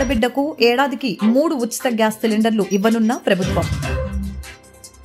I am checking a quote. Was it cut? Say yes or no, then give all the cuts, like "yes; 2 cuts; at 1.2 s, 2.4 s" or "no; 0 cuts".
no; 0 cuts